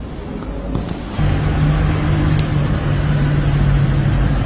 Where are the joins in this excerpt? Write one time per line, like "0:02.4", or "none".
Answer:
0:01.0